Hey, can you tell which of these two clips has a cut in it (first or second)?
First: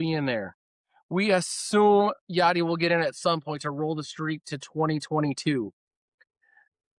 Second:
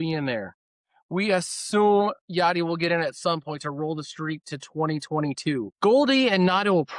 second